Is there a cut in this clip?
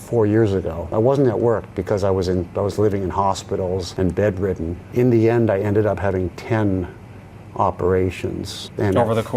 no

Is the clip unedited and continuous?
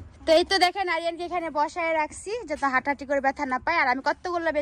yes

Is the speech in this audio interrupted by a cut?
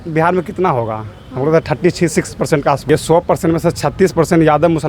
yes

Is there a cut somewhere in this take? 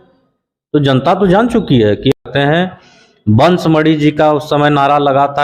yes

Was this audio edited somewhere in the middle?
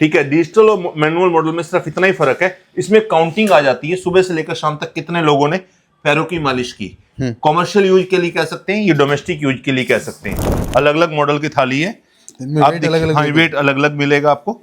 yes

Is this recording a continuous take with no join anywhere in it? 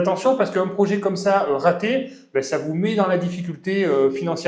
yes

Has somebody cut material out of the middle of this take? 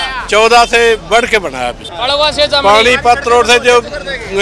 yes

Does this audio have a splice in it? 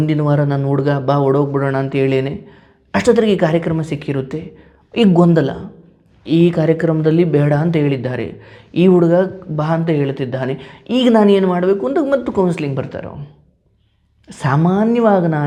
no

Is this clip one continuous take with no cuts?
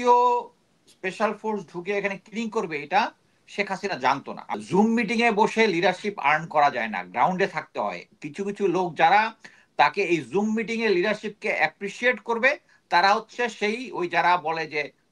no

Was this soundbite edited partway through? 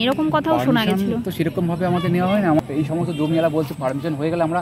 yes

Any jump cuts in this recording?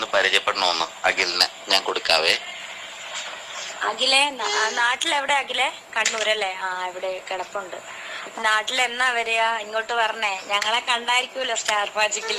no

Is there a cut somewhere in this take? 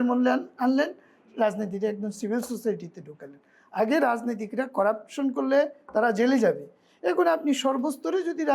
no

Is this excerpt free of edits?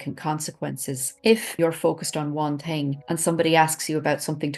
no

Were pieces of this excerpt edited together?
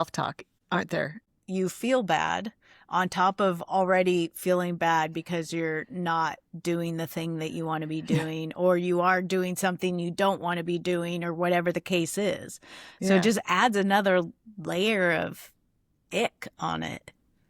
yes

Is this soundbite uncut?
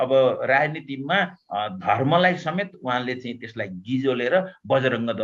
yes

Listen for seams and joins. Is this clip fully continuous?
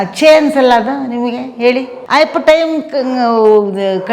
no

